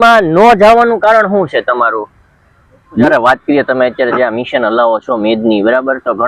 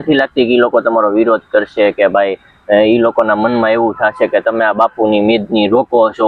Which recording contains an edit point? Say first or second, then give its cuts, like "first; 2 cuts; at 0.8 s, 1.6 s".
first; 1 cut; at 3.1 s